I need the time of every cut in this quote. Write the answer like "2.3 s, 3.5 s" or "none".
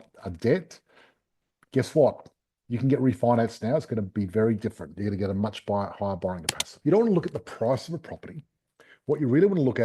6.7 s